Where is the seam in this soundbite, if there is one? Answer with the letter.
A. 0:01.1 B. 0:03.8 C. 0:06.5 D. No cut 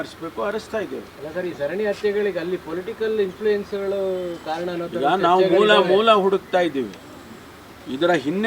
D